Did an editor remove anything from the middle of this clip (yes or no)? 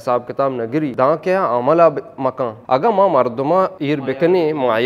yes